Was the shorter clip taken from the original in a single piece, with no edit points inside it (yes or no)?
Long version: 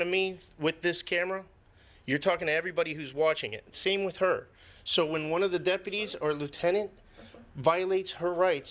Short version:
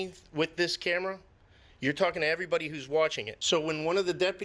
no